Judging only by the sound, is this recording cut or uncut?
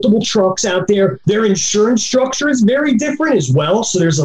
cut